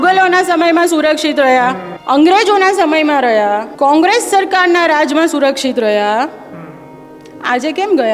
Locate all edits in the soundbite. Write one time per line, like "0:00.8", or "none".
0:01.9
0:03.7